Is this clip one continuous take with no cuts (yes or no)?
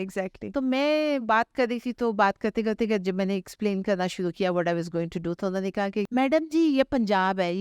no